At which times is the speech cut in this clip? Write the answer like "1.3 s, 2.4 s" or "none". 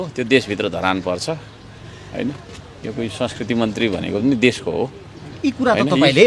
none